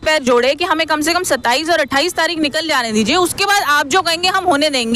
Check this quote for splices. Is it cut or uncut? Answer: uncut